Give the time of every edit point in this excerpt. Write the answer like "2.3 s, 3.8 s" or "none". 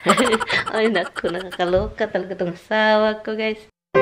none